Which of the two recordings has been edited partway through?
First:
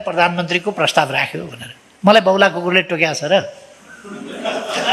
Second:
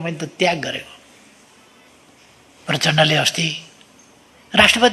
second; 1 cut; at 1.9 s

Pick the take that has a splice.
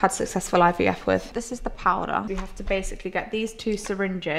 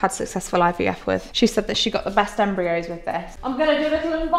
first; 1 cut; at 1.3 s

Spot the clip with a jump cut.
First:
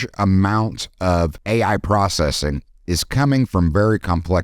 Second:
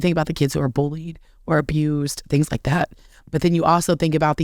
first; 1 cut; at 1.4 s

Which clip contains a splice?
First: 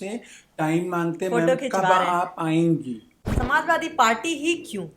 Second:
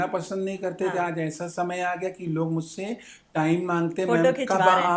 first; 1 cut; at 3.1 s

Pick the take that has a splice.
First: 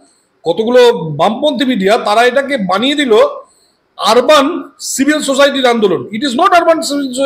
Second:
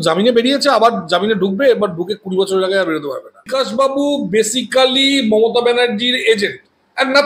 second; 1 cut; at 3.5 s

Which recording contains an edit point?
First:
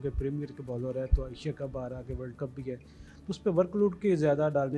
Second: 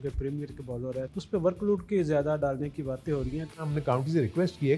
second; 2 cuts; at 1.1 s, 3.6 s

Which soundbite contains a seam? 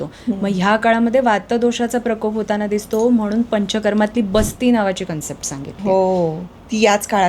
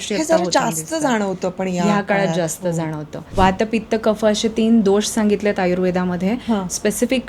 second; 1 cut; at 3.2 s

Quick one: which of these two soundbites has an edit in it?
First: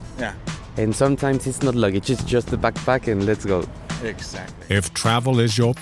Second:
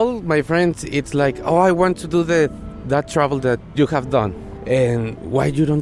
first; 1 cut; at 4.4 s

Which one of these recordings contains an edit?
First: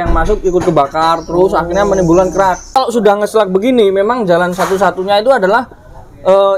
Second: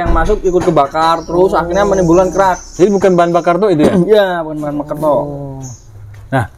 first; 1 cut; at 2.7 s

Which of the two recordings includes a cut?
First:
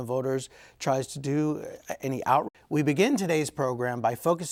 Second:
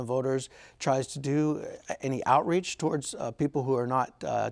second; 1 cut; at 2.5 s

